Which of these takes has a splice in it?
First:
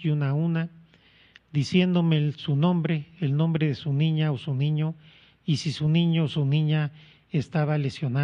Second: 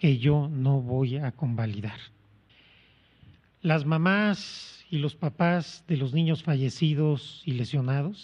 second; 1 cut; at 2.5 s

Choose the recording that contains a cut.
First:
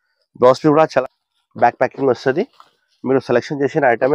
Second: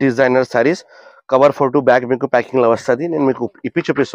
first; 1 cut; at 1.0 s

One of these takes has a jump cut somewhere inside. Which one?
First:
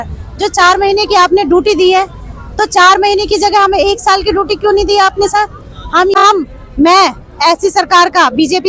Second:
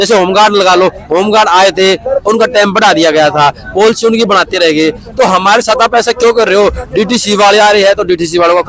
first; 1 cut; at 6.2 s

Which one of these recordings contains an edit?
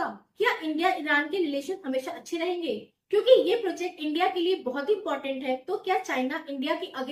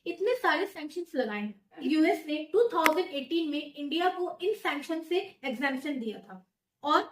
second; 1 cut; at 1.8 s

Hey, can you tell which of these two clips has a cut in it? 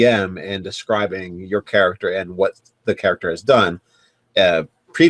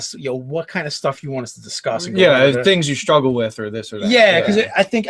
second; 1 cut; at 2.6 s

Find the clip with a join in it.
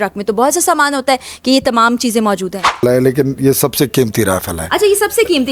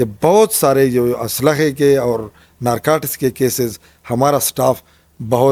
first; 1 cut; at 2.8 s

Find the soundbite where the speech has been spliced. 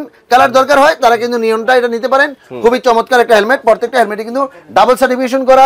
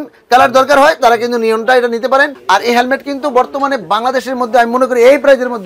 second; 1 cut; at 2.4 s

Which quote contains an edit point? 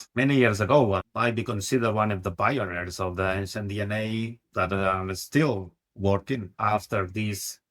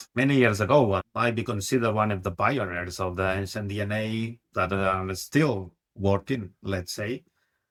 first; 1 cut; at 6.5 s

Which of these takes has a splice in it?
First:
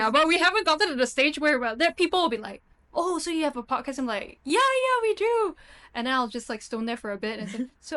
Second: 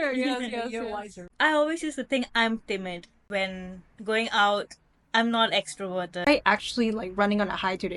second; 2 cuts; at 1.3 s, 6.2 s

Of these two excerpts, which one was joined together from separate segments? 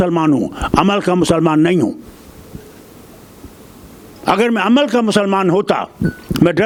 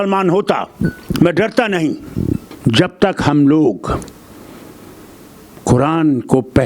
second; 1 cut; at 2.5 s

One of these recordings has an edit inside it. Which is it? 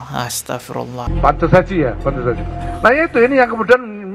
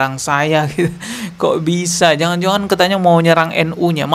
first; 1 cut; at 1.0 s

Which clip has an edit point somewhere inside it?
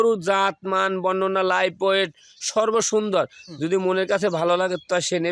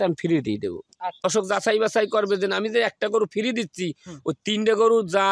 second; 1 cut; at 1.2 s

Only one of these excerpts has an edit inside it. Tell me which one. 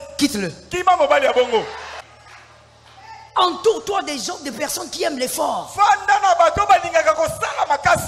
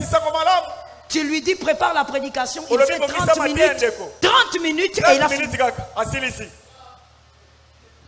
first; 1 cut; at 1.9 s

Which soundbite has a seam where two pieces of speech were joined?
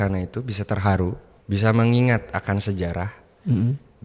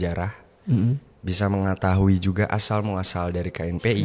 first; 1 cut; at 1.3 s

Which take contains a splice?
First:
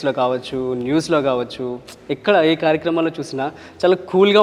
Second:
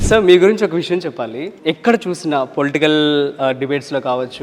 second; 1 cut; at 1.5 s

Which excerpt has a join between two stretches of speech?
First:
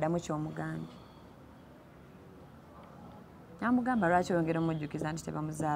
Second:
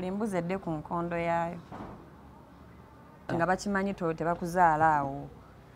second; 1 cut; at 3.3 s

